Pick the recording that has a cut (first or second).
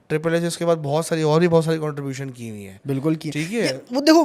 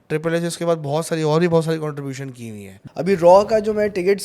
second